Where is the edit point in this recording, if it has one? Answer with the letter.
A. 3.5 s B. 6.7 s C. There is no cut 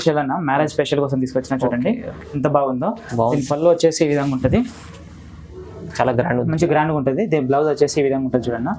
C